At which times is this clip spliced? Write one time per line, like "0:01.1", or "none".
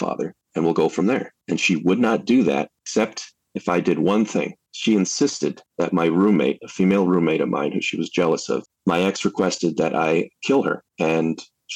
0:08.7